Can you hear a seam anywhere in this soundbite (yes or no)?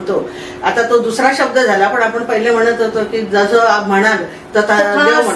no